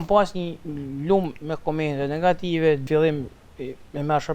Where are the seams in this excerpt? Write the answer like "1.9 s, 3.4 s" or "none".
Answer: 2.8 s